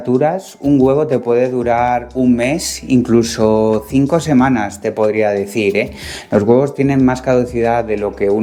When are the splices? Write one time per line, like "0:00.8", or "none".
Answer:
none